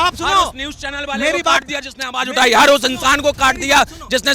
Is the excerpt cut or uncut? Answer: uncut